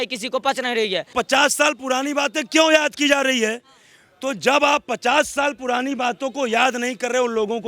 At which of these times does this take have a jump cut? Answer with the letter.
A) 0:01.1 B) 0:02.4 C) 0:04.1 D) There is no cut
A